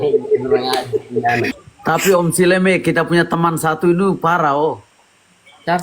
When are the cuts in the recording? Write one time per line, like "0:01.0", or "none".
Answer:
0:01.7